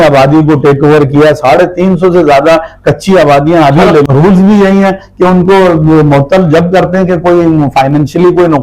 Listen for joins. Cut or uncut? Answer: cut